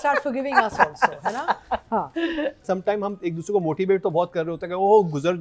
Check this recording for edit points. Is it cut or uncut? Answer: cut